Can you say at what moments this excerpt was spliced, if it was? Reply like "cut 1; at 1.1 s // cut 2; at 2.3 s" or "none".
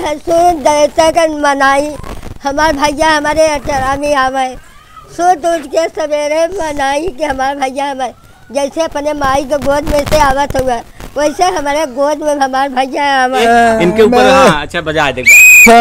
cut 1; at 13.4 s